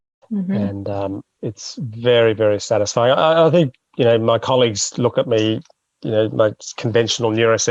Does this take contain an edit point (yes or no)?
yes